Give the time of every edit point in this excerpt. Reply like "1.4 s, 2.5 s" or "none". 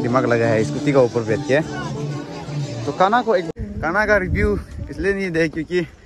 3.4 s